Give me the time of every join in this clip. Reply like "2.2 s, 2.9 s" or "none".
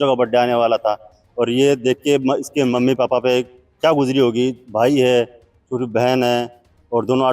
none